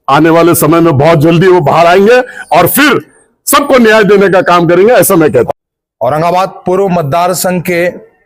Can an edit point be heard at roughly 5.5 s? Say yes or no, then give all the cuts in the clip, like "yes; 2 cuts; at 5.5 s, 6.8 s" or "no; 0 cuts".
yes; 1 cut; at 5.5 s